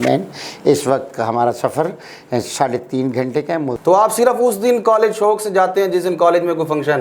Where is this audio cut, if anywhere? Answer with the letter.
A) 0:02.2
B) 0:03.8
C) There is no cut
B